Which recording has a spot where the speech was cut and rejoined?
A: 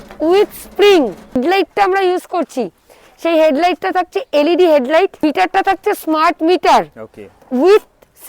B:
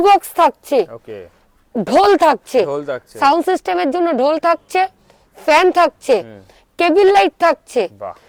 A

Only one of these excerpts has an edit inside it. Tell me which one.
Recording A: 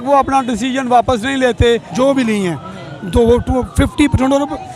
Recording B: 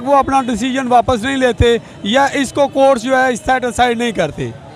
A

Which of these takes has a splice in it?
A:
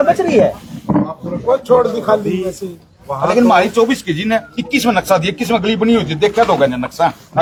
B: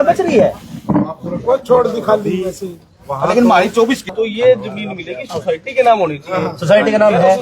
B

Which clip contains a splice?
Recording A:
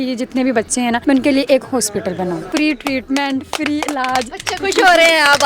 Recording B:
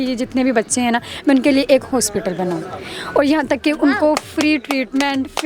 A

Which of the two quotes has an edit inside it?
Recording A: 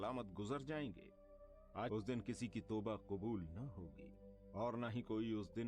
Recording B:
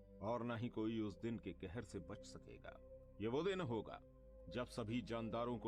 A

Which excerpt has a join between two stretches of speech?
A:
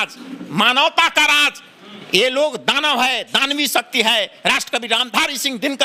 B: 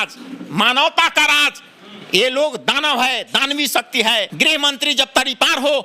B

